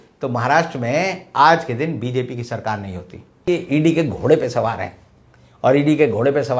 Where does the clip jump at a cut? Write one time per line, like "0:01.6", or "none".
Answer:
0:03.4

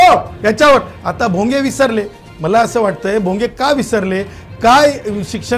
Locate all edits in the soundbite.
none

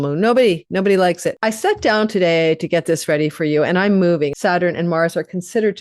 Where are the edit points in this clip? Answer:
0:01.3
0:04.3

